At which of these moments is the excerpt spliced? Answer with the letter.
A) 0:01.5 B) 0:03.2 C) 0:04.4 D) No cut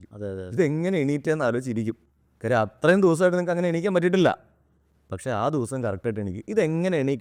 D